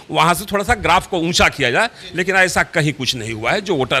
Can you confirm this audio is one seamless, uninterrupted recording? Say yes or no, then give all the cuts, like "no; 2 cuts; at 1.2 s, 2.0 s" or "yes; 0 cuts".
yes; 0 cuts